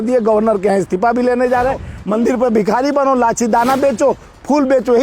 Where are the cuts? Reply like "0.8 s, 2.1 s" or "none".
1.9 s